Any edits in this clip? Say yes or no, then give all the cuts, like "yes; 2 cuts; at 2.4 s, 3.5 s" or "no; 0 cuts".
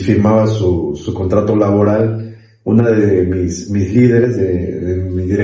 yes; 1 cut; at 1.0 s